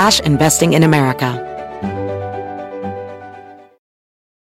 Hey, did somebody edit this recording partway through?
yes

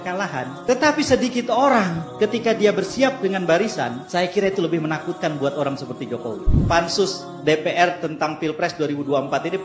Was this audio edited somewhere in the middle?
no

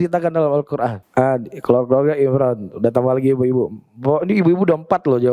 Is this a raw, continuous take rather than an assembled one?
no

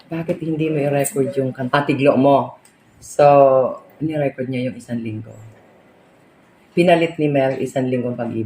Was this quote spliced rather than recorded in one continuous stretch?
yes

